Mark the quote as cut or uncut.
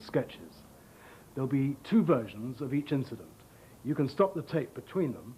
uncut